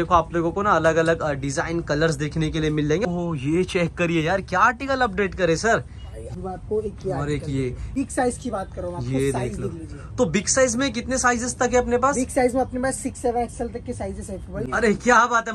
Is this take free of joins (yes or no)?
no